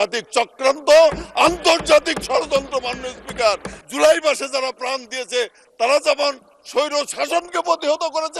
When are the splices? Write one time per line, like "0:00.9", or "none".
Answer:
0:03.7